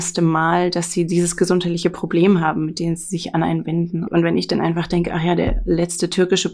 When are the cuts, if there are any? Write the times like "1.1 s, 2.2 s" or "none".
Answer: 4.0 s